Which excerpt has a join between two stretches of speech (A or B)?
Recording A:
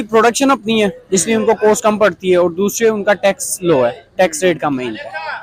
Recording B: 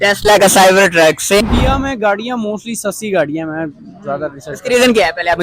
B